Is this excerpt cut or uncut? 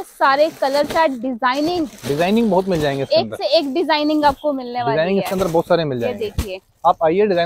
uncut